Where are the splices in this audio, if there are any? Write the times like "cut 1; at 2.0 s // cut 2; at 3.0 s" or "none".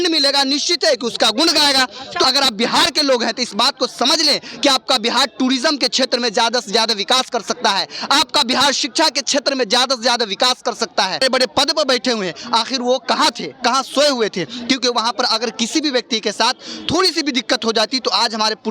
cut 1; at 2.2 s // cut 2; at 11.2 s